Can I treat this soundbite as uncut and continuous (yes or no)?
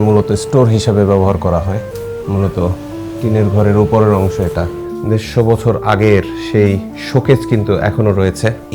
no